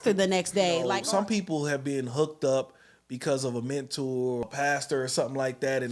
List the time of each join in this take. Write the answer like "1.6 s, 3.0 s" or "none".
0.9 s, 4.4 s

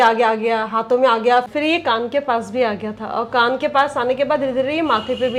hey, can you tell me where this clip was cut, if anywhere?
none

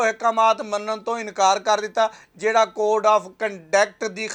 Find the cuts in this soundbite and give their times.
none

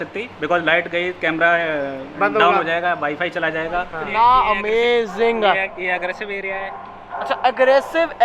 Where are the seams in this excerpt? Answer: 4.0 s

